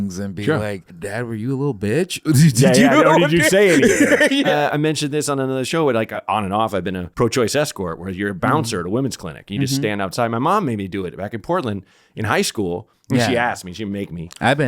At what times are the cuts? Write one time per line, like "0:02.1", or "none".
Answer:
0:00.9
0:04.5
0:06.1
0:07.1